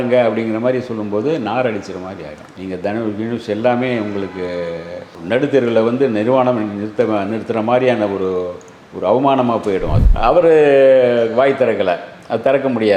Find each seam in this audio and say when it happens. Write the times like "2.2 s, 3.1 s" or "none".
10.0 s